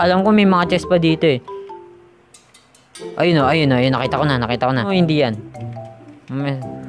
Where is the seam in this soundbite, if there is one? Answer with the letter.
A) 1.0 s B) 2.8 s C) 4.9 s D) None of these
C